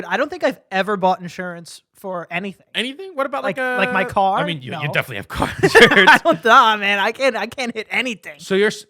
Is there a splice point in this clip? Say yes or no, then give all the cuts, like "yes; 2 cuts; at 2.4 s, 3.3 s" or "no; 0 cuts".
no; 0 cuts